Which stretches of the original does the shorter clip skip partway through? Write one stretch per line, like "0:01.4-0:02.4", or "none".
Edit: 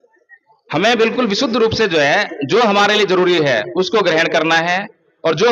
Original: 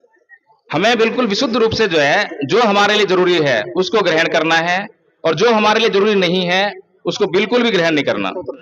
none